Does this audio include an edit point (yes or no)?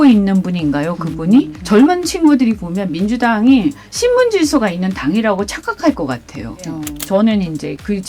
yes